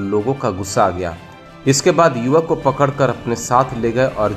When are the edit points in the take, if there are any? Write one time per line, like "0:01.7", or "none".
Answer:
none